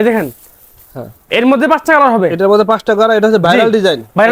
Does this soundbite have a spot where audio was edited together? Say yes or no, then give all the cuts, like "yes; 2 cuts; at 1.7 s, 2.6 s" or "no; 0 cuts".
no; 0 cuts